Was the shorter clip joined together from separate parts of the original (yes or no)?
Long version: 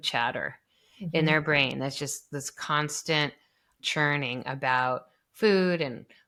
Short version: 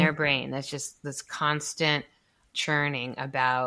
no